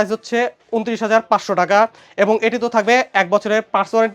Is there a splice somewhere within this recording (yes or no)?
no